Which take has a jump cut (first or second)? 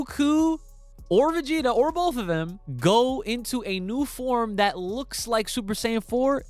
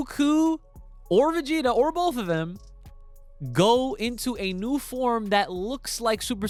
first